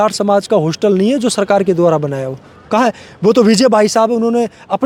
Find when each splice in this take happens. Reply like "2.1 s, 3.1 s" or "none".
none